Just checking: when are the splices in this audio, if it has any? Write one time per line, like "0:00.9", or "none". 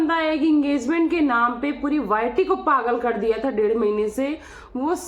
none